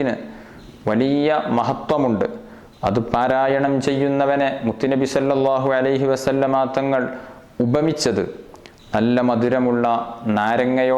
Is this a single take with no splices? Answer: yes; 0 cuts

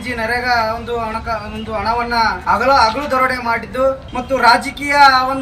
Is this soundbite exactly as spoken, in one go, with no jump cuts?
no; 2 cuts; at 2.4 s, 4.0 s

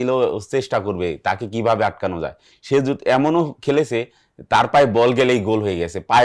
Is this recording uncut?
yes; 0 cuts

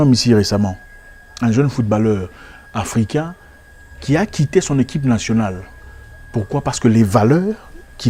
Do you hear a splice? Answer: no; 0 cuts

